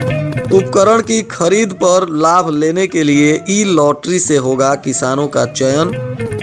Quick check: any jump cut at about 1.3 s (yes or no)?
no